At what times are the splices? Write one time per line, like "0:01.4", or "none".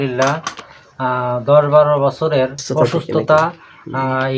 0:02.6